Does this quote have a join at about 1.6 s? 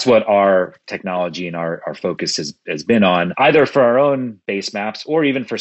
no; 1 cut; at 3.3 s

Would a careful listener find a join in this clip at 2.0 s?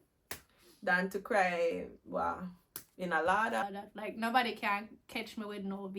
no; 1 cut; at 3.6 s

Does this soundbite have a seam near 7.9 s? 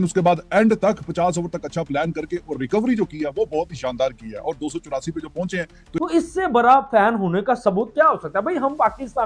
no; 1 cut; at 5.8 s

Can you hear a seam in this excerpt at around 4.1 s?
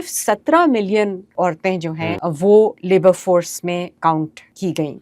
yes; 3 cuts; at 1.2 s, 2.2 s, 4.1 s

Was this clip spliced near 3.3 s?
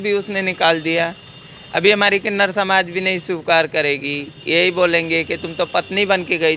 no; 0 cuts

